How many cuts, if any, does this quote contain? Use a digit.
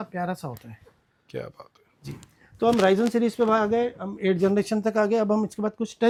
0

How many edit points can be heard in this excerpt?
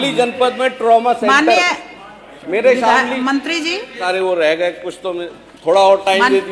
1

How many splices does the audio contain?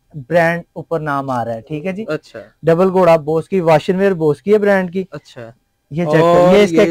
0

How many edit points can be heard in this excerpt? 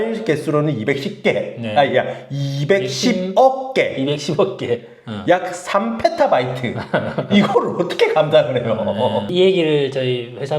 1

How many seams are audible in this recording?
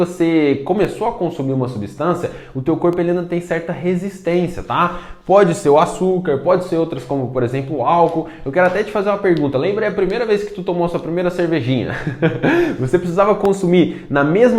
0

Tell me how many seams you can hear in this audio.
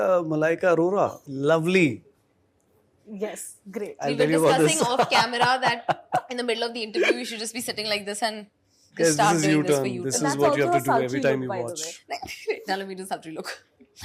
1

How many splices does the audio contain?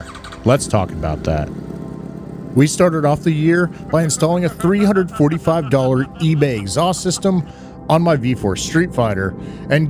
1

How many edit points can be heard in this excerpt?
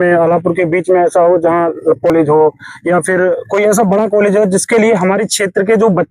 1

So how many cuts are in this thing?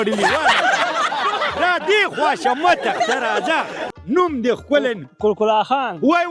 1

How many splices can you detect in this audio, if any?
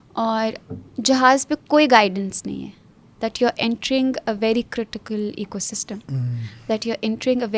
0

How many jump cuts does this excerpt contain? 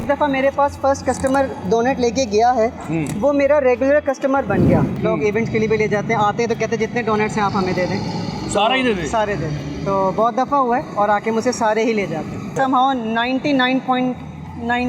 2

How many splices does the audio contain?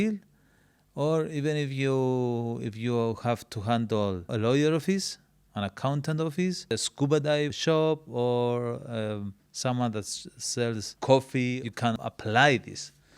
5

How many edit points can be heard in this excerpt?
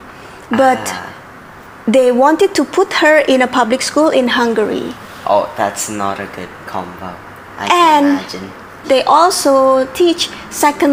0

